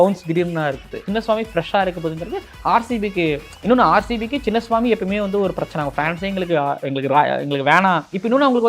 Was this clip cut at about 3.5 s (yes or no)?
no